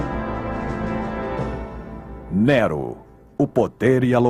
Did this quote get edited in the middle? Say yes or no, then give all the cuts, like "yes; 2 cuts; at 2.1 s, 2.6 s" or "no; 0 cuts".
no; 0 cuts